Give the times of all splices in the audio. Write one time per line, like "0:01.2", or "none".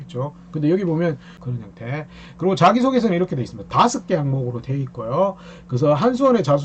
0:01.3